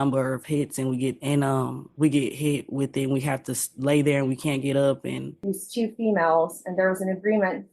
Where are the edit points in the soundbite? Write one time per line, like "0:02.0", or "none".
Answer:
0:05.3

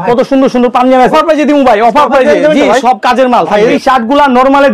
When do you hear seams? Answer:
0:01.1
0:03.8

